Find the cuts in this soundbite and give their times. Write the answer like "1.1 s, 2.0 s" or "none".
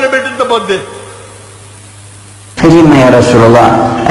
2.4 s

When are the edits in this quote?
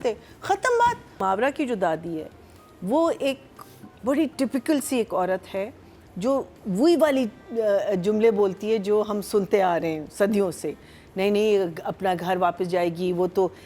1.2 s

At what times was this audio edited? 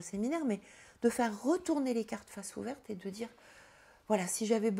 none

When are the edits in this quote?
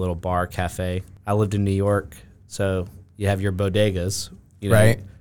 1.1 s

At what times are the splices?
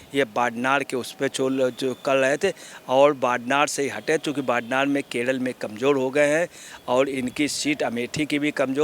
none

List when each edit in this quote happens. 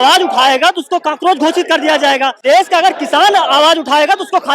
2.3 s

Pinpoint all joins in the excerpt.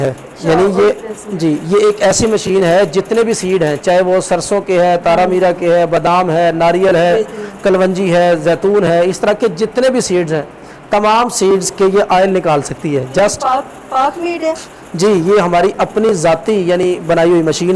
none

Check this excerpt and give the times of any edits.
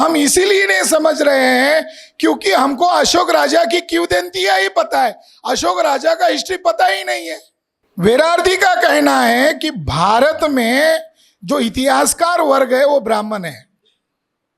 7.8 s

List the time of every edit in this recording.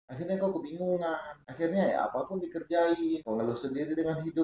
3.2 s

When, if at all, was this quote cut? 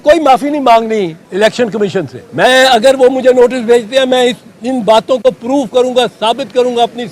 1.2 s, 2.2 s

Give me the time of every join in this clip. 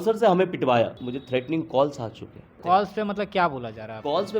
1.0 s, 2.6 s

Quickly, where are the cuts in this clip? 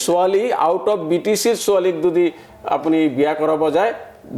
none

